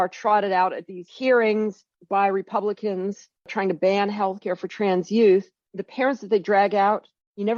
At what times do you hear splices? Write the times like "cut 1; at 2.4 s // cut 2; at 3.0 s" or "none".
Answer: none